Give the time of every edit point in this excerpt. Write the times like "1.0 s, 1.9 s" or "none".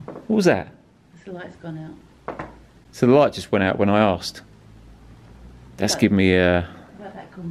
none